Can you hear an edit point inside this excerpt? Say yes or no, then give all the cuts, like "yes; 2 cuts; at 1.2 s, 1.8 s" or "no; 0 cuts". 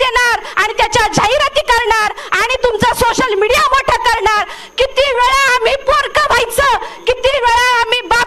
no; 0 cuts